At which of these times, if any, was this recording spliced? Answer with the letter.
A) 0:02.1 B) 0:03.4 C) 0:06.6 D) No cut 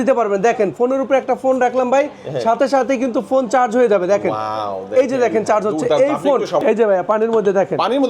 C